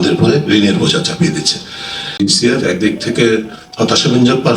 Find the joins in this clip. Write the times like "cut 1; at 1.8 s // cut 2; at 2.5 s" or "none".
cut 1; at 2.1 s